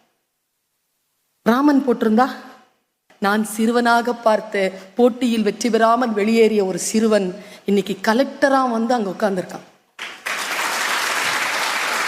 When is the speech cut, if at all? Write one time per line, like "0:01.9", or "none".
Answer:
0:03.0